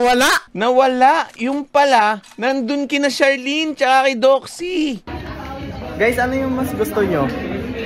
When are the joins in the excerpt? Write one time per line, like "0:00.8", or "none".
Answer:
none